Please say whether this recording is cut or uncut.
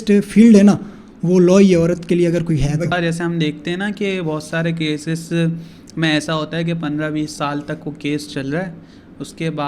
cut